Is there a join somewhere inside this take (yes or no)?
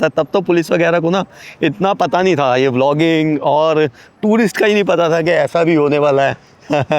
no